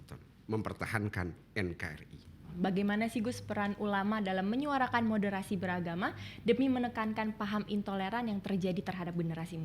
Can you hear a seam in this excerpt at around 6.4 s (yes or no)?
no